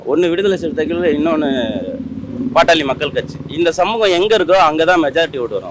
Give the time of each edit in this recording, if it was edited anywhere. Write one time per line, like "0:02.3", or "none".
none

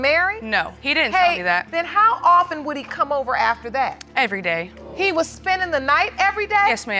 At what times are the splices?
0:00.8
0:01.7
0:04.8

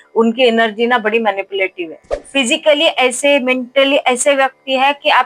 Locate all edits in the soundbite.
0:02.2

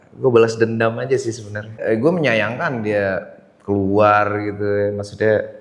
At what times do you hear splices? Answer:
0:01.8

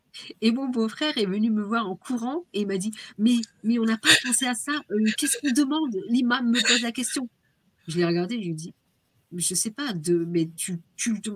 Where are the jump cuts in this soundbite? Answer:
none

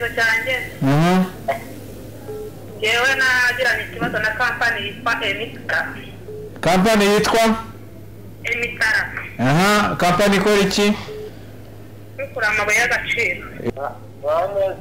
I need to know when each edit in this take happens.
0:13.7

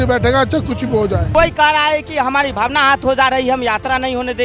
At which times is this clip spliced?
0:01.2

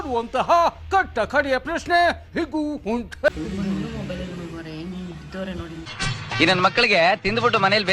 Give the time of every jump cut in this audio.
0:03.3

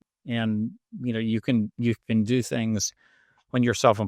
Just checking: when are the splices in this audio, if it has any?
none

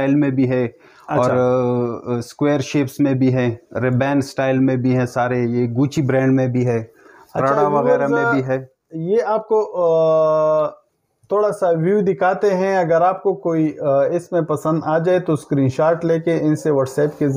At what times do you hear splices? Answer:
none

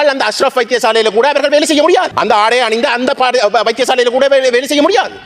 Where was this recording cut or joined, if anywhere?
0:02.1

